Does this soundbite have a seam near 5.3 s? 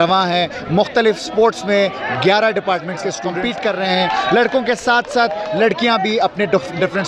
no; 1 cut; at 3.3 s

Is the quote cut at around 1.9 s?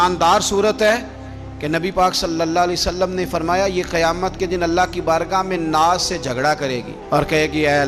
no; 0 cuts

